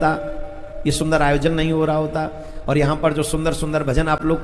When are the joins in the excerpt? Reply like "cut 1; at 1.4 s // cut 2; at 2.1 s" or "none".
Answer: none